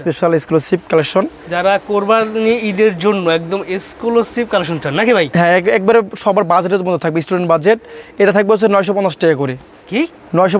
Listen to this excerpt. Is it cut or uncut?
uncut